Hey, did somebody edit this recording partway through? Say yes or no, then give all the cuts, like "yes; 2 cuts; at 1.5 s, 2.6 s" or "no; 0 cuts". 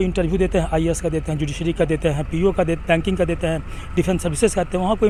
no; 0 cuts